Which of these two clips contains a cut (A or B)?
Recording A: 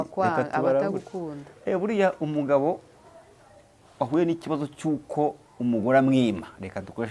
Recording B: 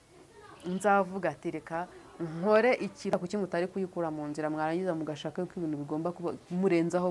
B